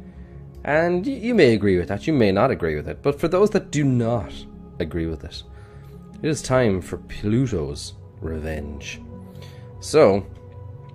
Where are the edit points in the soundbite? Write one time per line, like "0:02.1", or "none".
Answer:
0:02.3